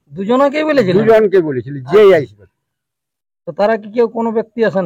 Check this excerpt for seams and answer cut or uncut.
uncut